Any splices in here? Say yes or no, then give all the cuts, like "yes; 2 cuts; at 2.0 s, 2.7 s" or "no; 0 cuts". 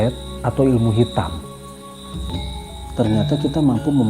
yes; 1 cut; at 2.5 s